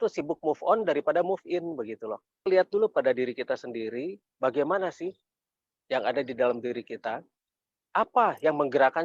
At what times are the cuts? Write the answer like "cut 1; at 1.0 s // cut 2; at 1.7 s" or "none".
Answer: cut 1; at 2.5 s